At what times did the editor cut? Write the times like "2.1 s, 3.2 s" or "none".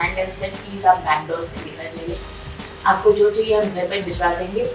none